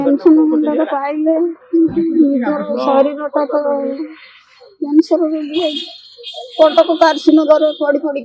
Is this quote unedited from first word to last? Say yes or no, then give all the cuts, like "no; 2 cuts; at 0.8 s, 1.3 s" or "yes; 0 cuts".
yes; 0 cuts